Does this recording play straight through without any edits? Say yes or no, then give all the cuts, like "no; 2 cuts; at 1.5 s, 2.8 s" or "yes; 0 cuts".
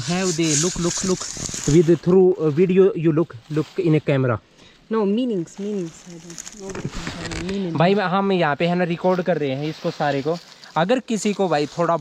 yes; 0 cuts